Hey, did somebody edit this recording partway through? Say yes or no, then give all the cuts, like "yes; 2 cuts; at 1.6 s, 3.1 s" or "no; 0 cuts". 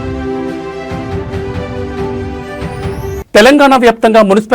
no; 0 cuts